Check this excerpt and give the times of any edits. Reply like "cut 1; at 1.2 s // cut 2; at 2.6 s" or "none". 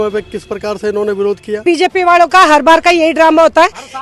cut 1; at 1.6 s